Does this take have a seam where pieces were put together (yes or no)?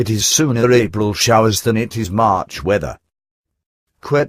no